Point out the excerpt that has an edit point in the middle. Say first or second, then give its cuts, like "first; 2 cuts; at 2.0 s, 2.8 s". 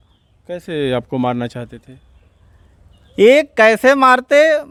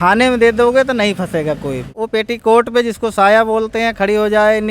second; 1 cut; at 1.9 s